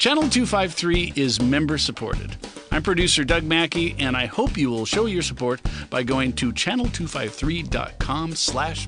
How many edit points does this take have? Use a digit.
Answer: 0